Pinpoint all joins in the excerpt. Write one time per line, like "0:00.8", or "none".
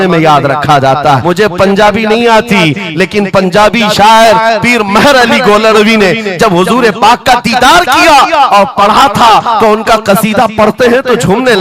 0:01.2